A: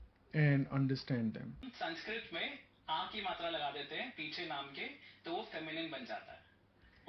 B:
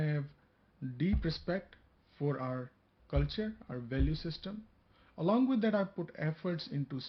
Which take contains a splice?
A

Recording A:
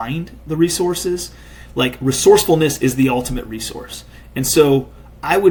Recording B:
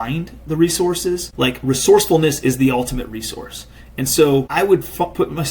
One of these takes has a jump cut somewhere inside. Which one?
B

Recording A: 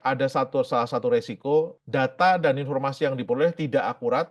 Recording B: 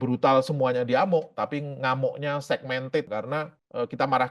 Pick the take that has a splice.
B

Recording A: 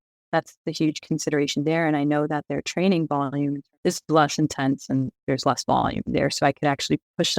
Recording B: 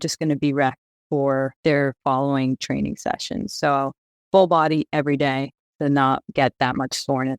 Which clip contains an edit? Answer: B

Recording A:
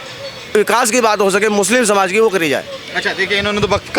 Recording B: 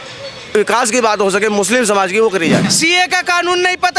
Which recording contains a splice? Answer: B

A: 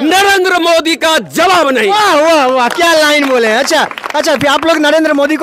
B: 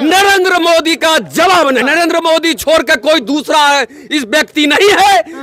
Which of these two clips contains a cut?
B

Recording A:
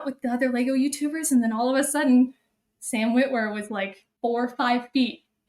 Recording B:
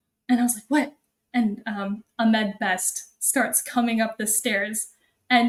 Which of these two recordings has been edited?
A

